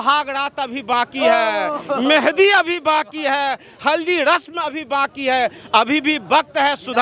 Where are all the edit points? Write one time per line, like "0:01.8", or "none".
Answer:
none

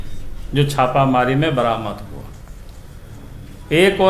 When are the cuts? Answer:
none

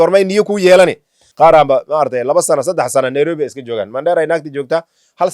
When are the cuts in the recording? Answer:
0:01.2

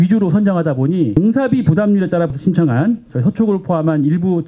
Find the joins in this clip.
0:01.1
0:02.3

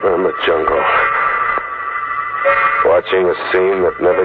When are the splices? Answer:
none

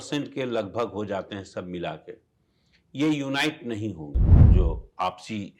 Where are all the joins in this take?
0:04.3

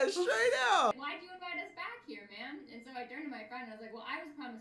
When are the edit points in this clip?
0:00.9

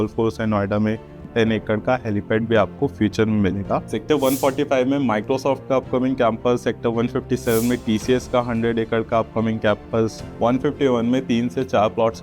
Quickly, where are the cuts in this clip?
0:01.3
0:03.9
0:10.2

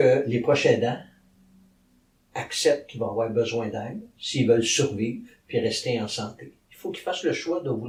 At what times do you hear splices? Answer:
none

